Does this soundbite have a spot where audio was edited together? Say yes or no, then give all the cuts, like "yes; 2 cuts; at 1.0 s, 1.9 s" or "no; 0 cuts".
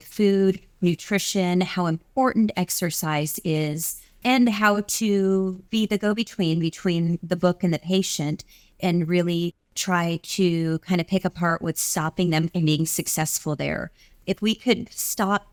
no; 0 cuts